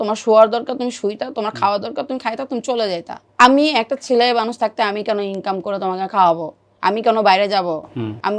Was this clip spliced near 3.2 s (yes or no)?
yes